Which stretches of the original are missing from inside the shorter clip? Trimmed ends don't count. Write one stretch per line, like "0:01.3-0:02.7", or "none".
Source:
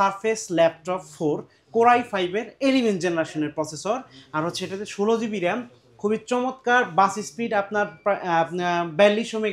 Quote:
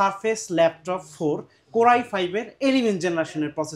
none